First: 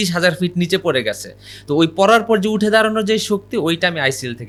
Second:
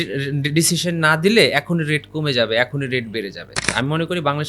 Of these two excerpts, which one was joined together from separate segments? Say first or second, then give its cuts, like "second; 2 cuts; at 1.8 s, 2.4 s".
second; 1 cut; at 3.6 s